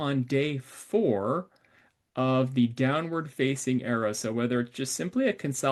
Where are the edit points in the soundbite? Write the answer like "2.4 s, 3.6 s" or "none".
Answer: none